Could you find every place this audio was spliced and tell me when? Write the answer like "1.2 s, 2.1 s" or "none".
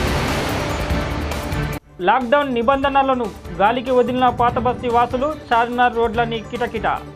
1.8 s